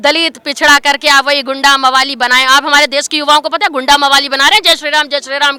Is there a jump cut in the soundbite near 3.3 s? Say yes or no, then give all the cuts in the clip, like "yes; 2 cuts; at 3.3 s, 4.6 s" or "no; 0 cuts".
no; 0 cuts